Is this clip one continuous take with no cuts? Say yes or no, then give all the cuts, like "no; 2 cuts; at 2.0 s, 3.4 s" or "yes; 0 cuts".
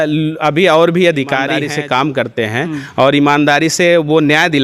no; 1 cut; at 2.0 s